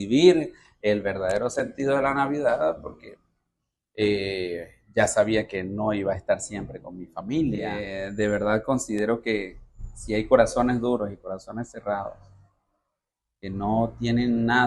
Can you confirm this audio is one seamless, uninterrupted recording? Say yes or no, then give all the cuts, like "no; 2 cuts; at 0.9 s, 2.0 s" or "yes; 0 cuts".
no; 1 cut; at 8.0 s